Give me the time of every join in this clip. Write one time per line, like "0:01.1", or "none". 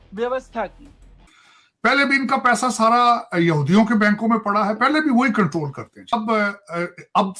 0:01.1
0:06.1

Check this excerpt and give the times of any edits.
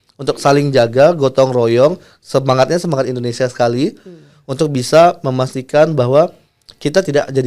none

